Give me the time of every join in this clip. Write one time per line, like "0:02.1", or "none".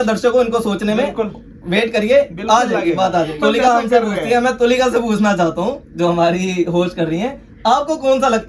0:03.3